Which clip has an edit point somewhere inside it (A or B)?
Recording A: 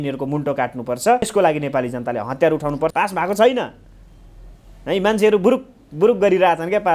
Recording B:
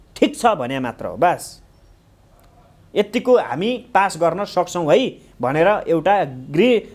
A